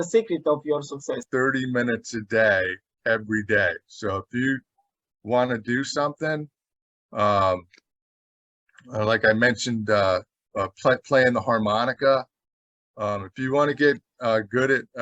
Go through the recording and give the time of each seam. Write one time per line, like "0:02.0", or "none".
0:01.2

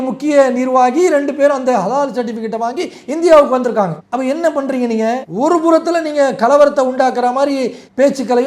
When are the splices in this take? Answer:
0:04.0
0:05.3

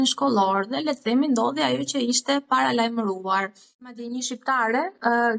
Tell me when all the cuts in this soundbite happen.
0:04.0

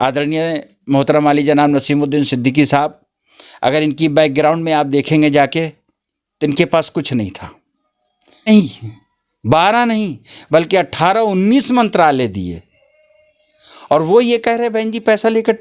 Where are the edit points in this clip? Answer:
0:08.5

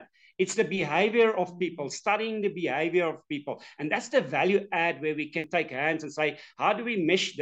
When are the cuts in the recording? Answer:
0:05.5

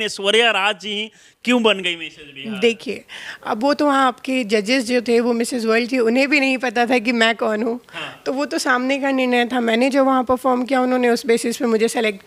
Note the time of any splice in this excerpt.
none

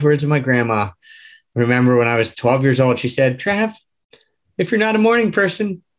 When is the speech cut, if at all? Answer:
0:01.3

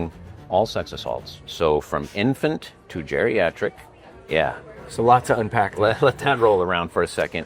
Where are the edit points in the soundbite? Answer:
none

